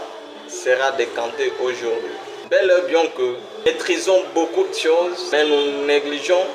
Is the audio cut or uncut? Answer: cut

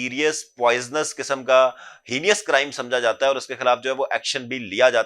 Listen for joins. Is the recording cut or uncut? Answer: uncut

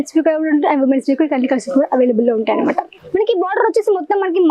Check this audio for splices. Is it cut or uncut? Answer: cut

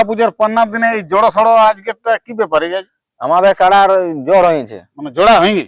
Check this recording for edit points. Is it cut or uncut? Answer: uncut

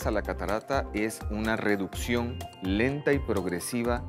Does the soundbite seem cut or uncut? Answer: uncut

